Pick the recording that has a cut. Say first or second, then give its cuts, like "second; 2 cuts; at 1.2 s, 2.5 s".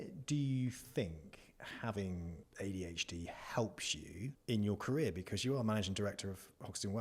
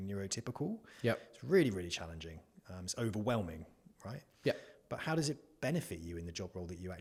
first; 2 cuts; at 2.4 s, 4.4 s